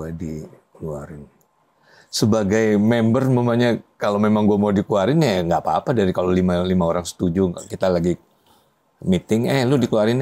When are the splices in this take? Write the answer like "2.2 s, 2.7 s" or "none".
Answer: 1.3 s